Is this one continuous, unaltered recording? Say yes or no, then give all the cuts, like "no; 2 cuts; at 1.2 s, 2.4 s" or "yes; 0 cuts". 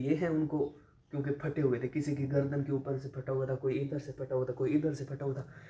yes; 0 cuts